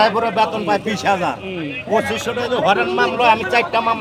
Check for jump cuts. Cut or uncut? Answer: uncut